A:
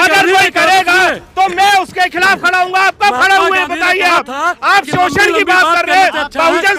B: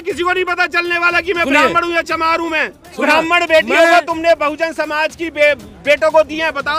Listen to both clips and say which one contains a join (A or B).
B